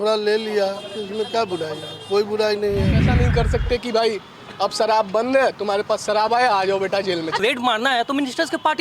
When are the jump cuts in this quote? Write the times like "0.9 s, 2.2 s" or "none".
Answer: 3.1 s, 7.4 s